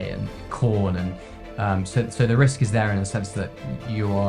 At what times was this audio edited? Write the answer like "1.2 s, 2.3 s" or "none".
none